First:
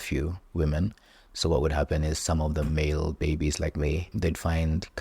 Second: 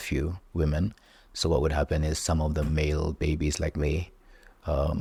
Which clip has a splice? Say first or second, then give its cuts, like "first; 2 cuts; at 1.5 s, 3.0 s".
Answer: first; 1 cut; at 4.1 s